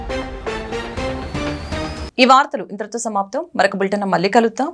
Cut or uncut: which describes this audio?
uncut